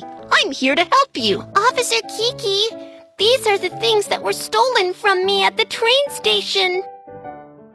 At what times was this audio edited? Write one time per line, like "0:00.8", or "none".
0:06.8